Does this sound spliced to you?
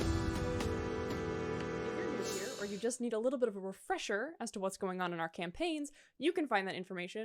yes; 1 cut; at 2.2 s

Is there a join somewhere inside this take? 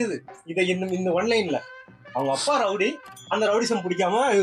no; 0 cuts

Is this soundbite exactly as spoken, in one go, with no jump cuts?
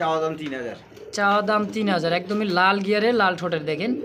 yes; 0 cuts

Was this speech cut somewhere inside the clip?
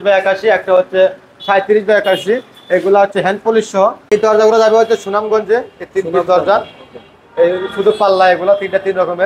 yes; 1 cut; at 4.0 s

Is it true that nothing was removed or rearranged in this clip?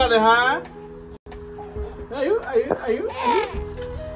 yes; 0 cuts

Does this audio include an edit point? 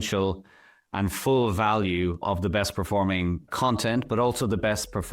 yes; 1 cut; at 2.2 s

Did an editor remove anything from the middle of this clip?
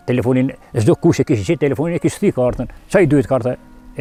no; 0 cuts

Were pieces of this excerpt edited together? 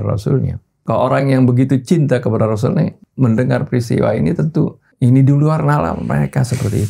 yes; 2 cuts; at 3.0 s, 4.8 s

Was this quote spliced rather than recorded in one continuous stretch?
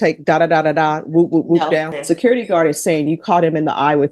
yes; 1 cut; at 1.9 s

